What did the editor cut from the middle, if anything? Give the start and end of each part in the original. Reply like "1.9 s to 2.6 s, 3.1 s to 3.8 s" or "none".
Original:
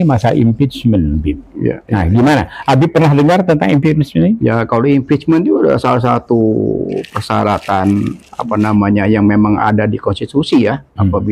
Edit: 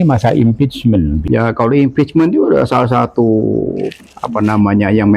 1.2 s to 4.4 s, 7.2 s to 8.2 s